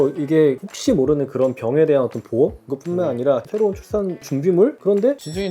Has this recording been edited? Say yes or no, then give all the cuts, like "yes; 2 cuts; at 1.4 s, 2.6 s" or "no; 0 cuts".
yes; 1 cut; at 3.5 s